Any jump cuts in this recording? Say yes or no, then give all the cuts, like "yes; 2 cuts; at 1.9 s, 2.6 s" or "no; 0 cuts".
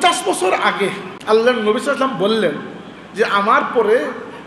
yes; 1 cut; at 1.1 s